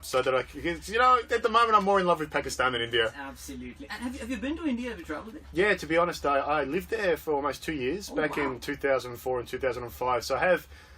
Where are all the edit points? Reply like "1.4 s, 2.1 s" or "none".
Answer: 7.6 s